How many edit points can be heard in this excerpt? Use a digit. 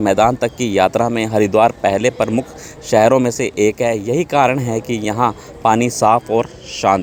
0